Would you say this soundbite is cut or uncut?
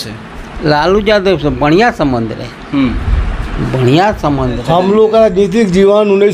cut